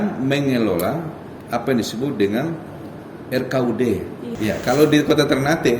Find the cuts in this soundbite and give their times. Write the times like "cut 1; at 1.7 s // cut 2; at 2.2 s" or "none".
cut 1; at 4.2 s